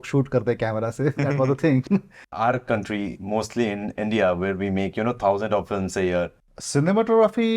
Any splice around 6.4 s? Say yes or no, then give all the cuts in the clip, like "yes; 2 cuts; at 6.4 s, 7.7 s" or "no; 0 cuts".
yes; 2 cuts; at 2.3 s, 6.4 s